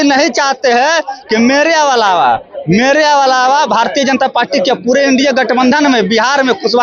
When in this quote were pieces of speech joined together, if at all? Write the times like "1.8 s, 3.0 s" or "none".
none

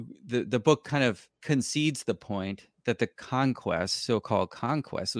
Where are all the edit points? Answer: 1.3 s

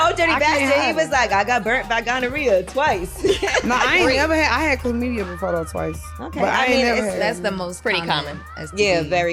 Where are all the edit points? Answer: none

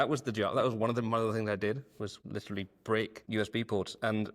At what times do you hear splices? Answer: 2.2 s, 3.3 s

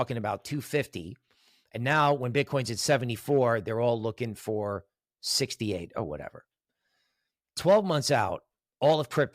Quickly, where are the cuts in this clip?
none

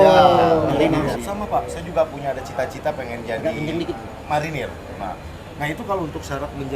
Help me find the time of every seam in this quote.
1.0 s

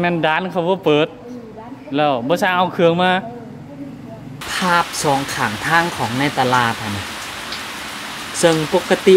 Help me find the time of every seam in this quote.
4.4 s

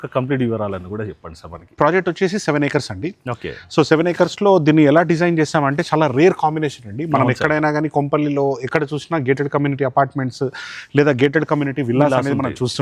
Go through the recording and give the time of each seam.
1.8 s

